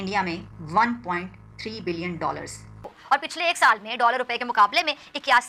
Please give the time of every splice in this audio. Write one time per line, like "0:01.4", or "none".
0:02.9